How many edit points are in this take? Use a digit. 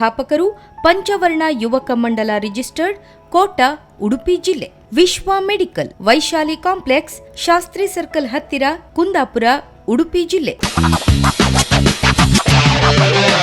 1